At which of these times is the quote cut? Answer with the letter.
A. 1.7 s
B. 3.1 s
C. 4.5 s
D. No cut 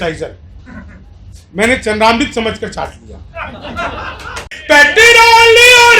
C